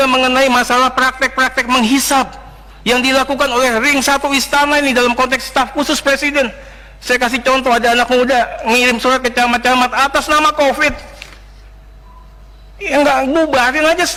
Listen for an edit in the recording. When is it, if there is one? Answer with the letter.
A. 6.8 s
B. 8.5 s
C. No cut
C